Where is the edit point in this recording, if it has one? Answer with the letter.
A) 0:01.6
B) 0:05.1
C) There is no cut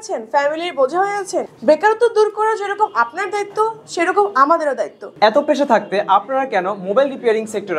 B